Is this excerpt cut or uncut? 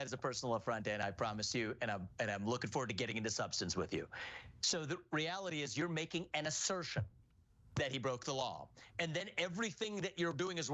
cut